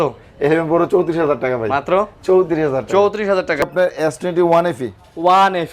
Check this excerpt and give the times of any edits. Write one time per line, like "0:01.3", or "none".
0:03.6